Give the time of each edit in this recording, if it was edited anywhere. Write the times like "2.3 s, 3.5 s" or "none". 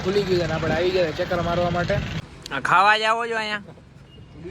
2.2 s